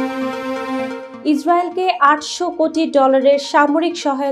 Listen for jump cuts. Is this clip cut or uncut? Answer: cut